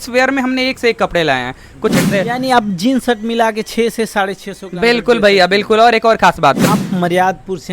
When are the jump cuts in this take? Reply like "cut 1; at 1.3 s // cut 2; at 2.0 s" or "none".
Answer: cut 1; at 1.9 s // cut 2; at 6.7 s